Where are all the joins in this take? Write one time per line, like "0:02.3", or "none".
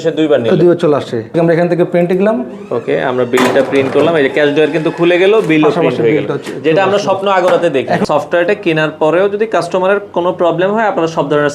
0:01.3
0:08.0